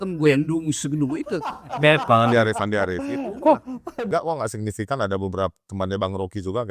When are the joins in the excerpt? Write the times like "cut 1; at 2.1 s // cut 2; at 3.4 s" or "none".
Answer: cut 1; at 4.1 s